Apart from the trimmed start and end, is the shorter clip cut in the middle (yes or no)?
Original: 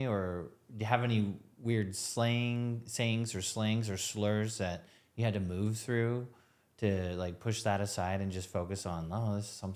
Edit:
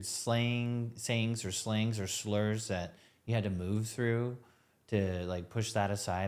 no